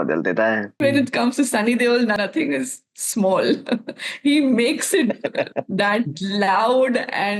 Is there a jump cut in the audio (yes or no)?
yes